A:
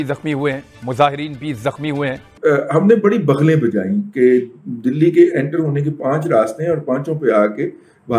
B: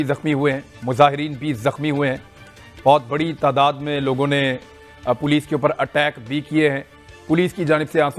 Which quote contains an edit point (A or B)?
A